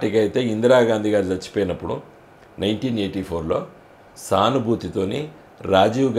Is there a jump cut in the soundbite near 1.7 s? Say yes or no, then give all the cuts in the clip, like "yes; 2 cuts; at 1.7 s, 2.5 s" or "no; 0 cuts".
no; 0 cuts